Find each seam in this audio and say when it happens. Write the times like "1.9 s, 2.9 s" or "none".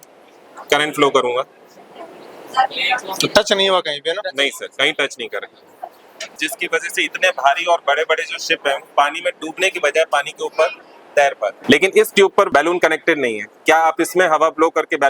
6.4 s, 11.6 s, 12.5 s